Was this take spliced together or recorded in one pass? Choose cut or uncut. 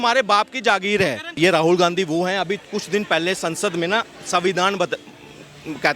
cut